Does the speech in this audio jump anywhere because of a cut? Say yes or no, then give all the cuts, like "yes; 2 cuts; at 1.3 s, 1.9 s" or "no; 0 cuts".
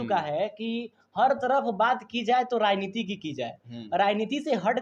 no; 0 cuts